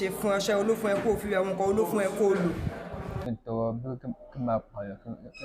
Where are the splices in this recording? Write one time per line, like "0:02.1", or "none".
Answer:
0:03.2